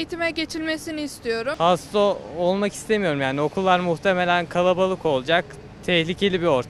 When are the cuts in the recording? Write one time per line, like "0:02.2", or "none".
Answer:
0:01.5